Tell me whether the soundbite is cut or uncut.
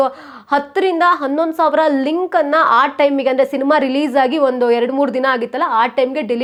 uncut